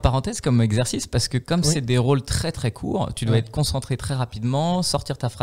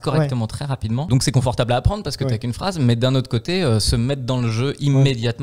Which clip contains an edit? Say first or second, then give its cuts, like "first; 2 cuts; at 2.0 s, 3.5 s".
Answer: second; 1 cut; at 1.1 s